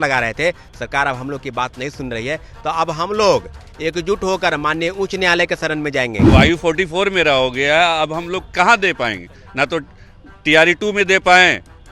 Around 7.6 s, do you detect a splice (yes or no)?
no